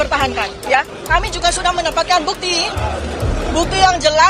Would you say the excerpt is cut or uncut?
cut